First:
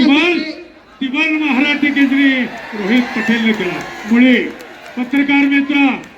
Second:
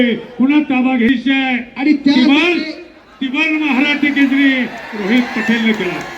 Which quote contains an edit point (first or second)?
second